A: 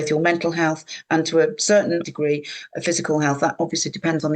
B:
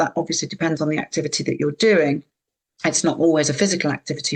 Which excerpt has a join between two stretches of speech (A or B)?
A